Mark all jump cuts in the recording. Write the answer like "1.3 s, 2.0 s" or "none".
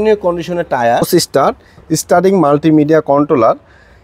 1.1 s